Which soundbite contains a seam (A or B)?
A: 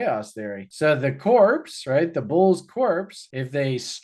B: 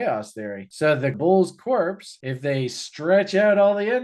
B